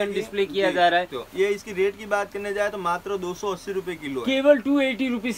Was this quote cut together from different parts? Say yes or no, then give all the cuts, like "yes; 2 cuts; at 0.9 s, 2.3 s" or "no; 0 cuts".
yes; 1 cut; at 1.2 s